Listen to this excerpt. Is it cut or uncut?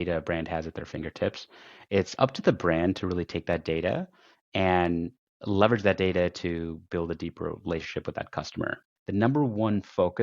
cut